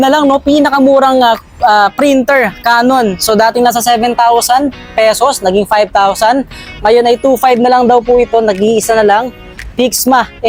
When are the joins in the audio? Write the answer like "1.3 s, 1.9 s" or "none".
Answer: none